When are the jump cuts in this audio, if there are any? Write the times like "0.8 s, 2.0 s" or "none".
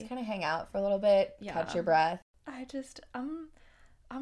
2.3 s